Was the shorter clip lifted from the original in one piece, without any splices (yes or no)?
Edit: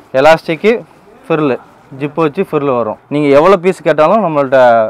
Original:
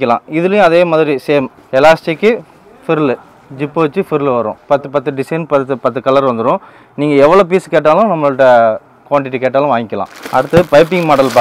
no